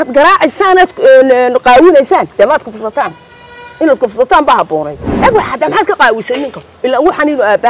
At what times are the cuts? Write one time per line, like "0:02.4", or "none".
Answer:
0:05.1